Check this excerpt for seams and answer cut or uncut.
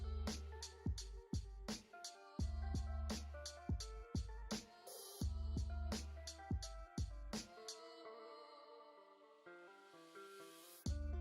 cut